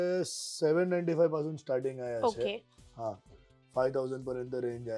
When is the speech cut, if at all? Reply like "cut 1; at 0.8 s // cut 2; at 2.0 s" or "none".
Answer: none